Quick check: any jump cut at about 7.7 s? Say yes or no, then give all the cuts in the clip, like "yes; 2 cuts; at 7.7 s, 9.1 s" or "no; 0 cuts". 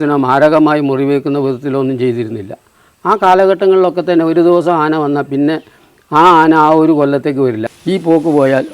yes; 1 cut; at 7.7 s